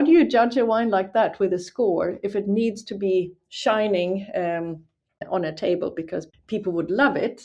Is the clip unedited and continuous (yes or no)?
no